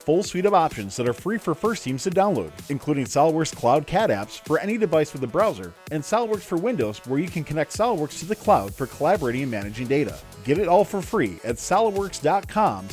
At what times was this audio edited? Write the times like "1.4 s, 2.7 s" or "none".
none